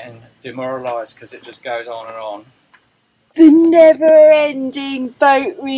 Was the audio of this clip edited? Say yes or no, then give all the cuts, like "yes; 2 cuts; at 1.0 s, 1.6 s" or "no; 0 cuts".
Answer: no; 0 cuts